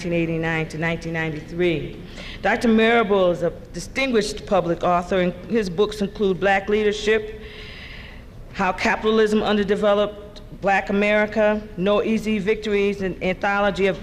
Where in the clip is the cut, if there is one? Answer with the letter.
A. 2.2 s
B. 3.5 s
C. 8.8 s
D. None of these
C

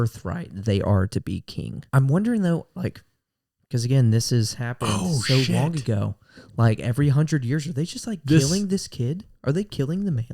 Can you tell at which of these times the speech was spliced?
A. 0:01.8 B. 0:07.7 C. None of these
A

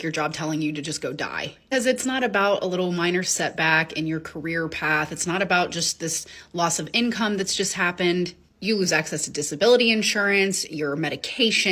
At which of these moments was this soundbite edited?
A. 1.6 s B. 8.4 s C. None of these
C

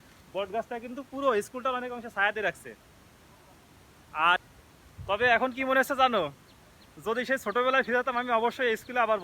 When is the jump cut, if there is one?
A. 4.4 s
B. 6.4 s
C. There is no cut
A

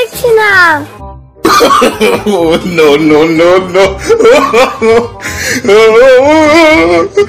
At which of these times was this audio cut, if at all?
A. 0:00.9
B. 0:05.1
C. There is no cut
A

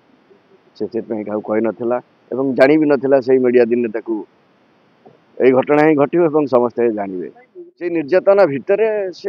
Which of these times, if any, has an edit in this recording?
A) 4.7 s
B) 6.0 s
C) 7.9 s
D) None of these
C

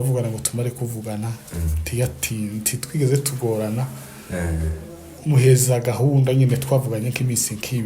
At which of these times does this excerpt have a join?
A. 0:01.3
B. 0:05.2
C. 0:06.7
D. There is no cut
D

